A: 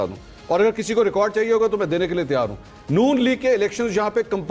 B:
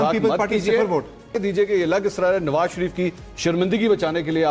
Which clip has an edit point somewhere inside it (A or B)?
B